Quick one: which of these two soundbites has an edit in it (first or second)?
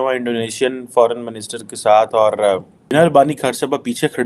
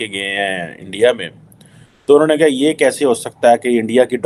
first